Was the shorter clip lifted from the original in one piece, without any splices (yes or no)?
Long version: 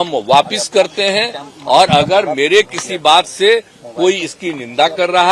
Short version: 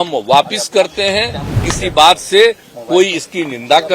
no